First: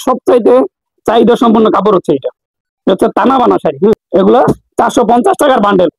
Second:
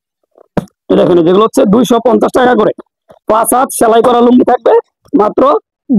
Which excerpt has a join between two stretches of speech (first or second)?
first